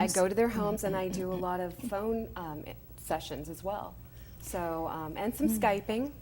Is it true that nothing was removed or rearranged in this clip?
yes; 0 cuts

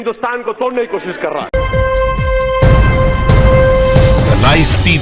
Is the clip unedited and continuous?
no; 1 cut; at 1.5 s

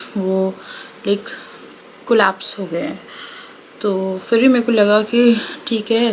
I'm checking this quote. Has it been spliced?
no; 0 cuts

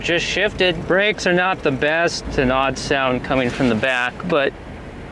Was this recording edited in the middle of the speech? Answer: yes; 2 cuts; at 0.8 s, 2.2 s

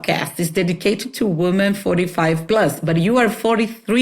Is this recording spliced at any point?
yes; 1 cut; at 2.4 s

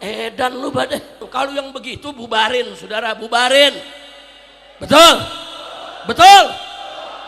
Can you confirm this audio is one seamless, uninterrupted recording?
no; 1 cut; at 1.3 s

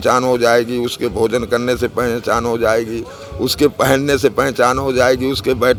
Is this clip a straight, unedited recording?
yes; 0 cuts

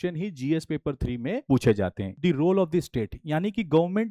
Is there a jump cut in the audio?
yes; 1 cut; at 2.1 s

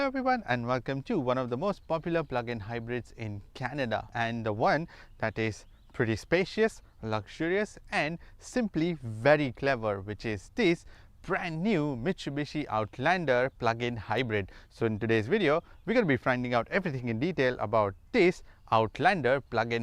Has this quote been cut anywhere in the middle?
yes; 1 cut; at 1.4 s

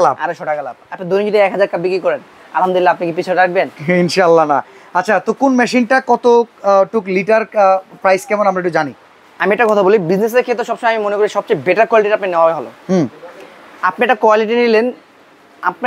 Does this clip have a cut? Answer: no; 0 cuts

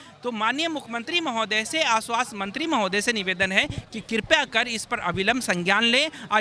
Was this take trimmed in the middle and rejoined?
no; 0 cuts

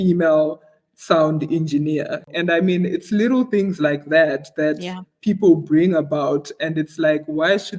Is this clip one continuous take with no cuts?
no; 1 cut; at 2.3 s

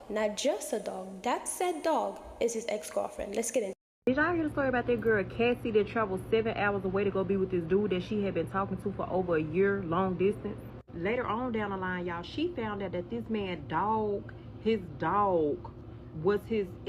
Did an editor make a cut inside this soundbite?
no; 0 cuts

